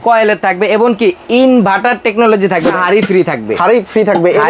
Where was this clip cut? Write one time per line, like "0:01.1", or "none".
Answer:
0:02.7